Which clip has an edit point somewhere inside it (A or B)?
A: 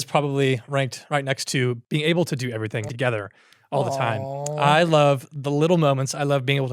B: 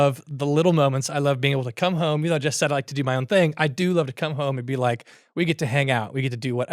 A